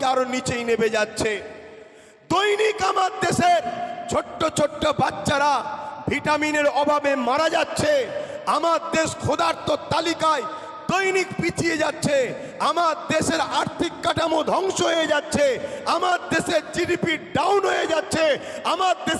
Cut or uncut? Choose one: uncut